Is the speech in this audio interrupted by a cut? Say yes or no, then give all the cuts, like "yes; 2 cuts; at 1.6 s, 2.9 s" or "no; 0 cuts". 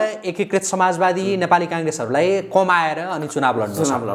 no; 0 cuts